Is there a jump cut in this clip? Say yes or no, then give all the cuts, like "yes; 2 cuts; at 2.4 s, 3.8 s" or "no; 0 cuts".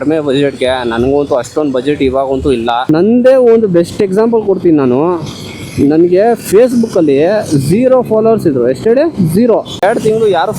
yes; 2 cuts; at 2.8 s, 9.7 s